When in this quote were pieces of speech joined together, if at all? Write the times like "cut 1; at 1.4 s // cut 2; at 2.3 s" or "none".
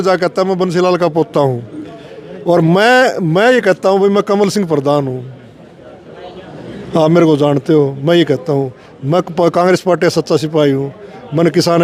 none